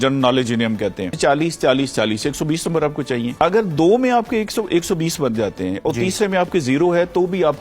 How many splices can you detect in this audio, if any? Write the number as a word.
two